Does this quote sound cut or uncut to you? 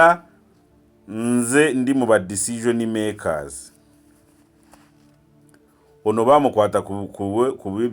uncut